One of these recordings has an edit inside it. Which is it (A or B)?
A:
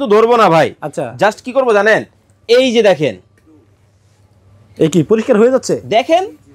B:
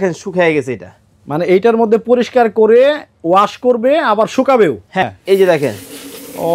B